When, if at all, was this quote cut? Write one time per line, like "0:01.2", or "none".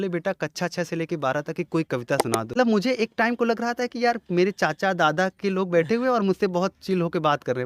0:02.5

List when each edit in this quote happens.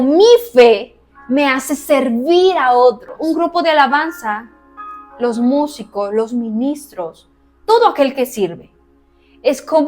0:03.1

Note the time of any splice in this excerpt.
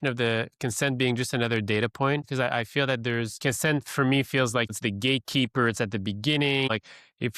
0:02.2
0:03.4
0:04.7
0:06.7

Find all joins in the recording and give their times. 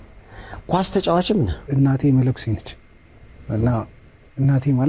0:01.7

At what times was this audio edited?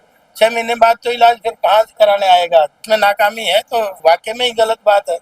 0:02.8
0:03.9

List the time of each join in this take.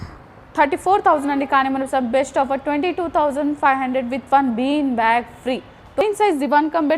0:06.0

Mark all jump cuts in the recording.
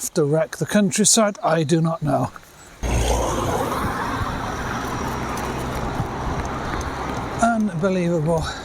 0:02.8

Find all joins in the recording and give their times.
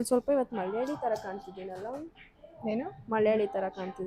none

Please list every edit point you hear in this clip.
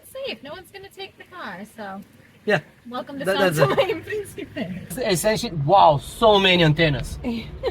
0:05.0

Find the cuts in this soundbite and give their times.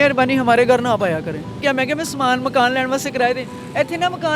0:01.5

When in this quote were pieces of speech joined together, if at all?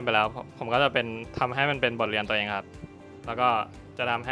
none

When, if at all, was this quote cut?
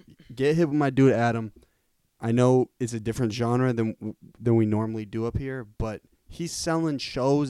none

